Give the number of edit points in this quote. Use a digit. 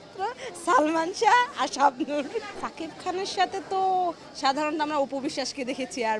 1